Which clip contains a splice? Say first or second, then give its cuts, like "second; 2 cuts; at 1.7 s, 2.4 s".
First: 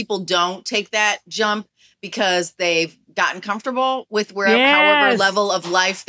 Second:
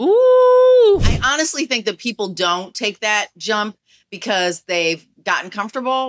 second; 1 cut; at 1.0 s